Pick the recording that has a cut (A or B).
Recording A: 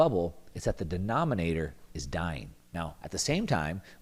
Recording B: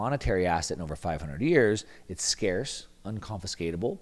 A